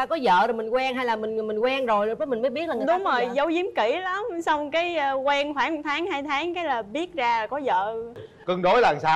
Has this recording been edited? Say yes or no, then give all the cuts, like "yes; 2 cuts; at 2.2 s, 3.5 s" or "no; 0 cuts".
yes; 1 cut; at 8.3 s